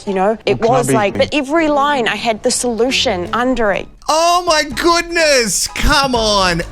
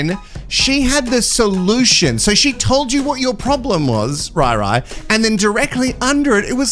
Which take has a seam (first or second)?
first